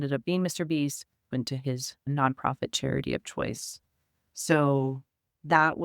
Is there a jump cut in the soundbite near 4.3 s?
no; 1 cut; at 1.3 s

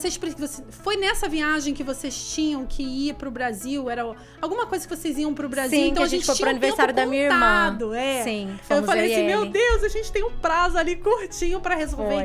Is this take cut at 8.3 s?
no; 0 cuts

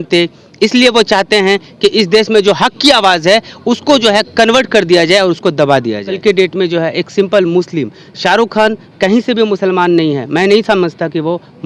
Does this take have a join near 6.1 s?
yes; 1 cut; at 6.1 s

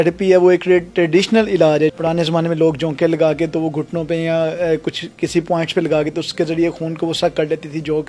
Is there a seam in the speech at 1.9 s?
yes; 1 cut; at 1.9 s

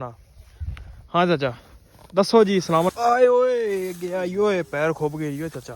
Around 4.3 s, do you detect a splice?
no; 1 cut; at 2.9 s

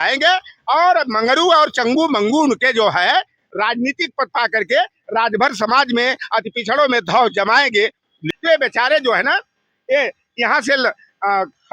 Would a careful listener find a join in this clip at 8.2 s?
yes; 1 cut; at 8.2 s

